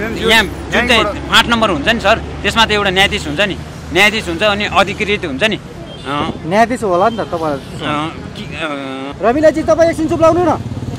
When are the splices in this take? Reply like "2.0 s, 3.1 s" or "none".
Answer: 9.0 s